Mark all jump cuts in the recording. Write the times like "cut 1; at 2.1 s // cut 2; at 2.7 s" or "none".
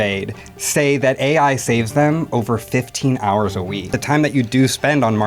cut 1; at 4.0 s